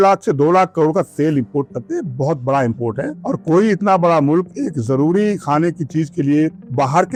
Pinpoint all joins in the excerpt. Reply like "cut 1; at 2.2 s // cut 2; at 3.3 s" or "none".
none